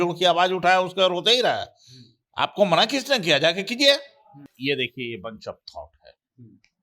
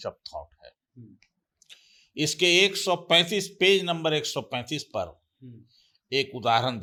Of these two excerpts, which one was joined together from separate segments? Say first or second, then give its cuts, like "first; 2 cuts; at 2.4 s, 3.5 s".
first; 1 cut; at 4.5 s